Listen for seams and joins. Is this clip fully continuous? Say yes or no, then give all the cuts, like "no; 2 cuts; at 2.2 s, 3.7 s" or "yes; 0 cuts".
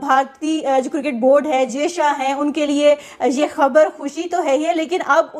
yes; 0 cuts